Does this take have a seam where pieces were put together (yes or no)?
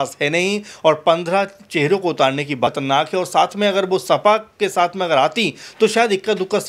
yes